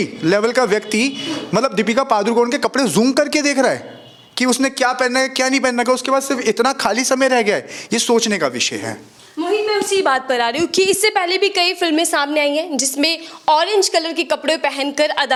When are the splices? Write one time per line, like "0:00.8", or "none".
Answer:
none